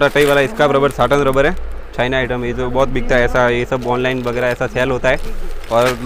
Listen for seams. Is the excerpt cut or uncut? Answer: uncut